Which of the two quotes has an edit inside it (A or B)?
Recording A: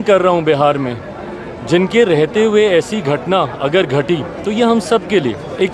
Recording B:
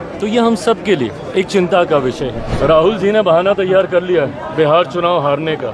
B